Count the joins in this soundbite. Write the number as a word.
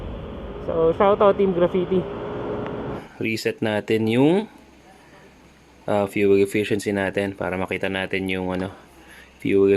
one